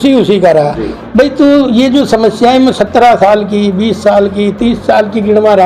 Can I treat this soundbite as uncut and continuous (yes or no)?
yes